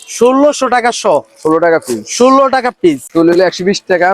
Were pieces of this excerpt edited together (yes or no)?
yes